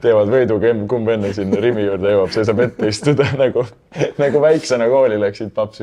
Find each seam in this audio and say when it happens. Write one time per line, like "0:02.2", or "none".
none